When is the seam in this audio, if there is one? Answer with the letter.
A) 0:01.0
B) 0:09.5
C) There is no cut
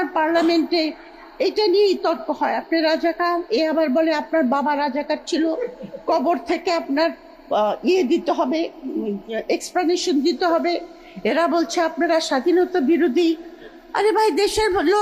C